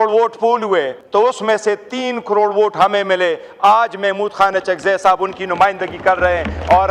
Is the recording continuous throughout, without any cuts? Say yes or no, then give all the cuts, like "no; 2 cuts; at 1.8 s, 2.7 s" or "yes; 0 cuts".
no; 1 cut; at 1.0 s